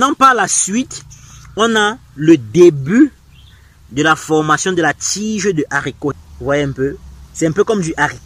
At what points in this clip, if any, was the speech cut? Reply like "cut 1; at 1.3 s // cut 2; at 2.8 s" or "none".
cut 1; at 6.1 s